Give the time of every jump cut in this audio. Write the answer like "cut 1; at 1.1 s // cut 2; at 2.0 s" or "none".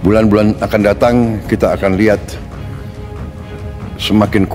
none